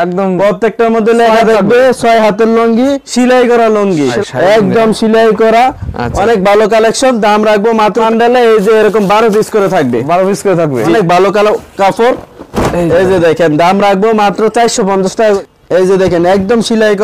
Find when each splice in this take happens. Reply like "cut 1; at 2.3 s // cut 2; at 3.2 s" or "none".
cut 1; at 4.2 s // cut 2; at 8.0 s // cut 3; at 10.9 s // cut 4; at 15.4 s